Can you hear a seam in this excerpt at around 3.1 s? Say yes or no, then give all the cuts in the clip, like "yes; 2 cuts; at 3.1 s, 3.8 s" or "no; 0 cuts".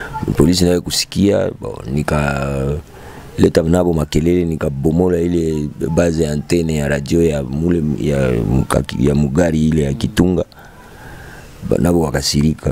no; 0 cuts